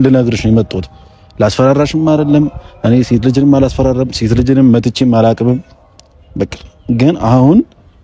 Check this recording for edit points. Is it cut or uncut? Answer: uncut